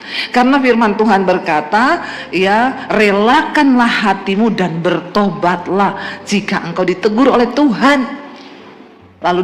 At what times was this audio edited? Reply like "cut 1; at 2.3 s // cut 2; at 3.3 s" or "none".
none